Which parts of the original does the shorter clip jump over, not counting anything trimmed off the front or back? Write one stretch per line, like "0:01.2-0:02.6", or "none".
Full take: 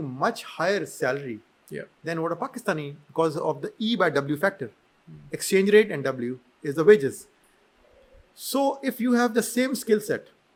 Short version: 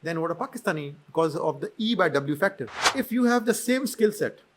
0:04.9-0:08.8